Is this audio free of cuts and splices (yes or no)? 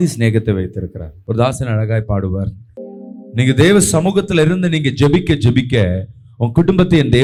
yes